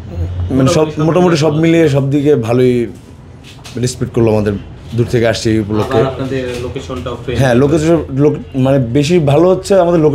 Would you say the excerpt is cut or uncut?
uncut